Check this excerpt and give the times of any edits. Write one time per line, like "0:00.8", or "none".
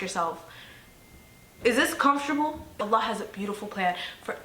0:02.6